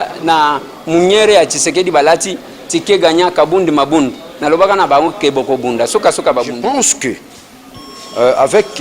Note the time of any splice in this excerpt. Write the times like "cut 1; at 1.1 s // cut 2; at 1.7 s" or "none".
cut 1; at 6.6 s